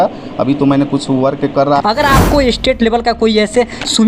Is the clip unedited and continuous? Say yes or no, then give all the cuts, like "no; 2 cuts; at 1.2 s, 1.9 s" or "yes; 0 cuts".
no; 1 cut; at 1.8 s